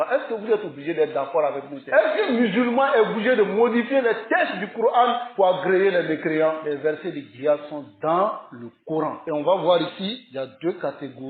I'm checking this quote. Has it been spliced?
yes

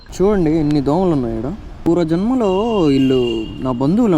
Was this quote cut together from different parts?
yes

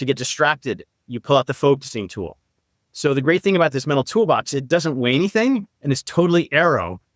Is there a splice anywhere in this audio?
no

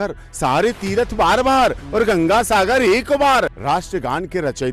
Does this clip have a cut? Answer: yes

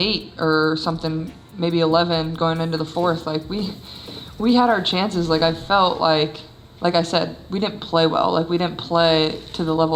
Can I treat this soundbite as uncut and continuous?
yes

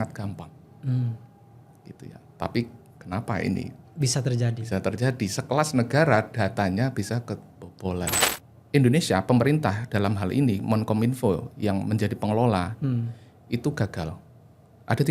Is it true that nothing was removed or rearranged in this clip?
no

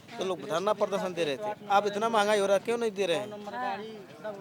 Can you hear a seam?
no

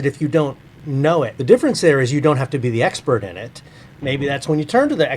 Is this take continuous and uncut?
no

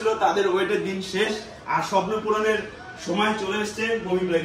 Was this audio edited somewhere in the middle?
no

